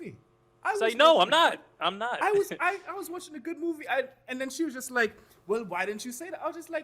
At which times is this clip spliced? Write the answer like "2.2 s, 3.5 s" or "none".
none